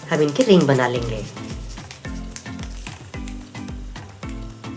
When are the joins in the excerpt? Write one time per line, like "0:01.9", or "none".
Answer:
0:01.3
0:03.7